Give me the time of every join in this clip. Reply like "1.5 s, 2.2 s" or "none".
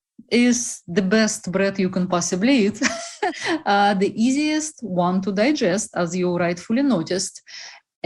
3.2 s